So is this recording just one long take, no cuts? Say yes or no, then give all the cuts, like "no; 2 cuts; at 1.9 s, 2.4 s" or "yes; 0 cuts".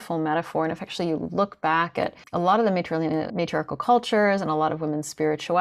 no; 2 cuts; at 2.2 s, 3.3 s